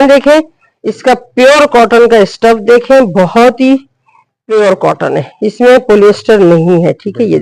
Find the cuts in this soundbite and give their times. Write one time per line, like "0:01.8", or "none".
none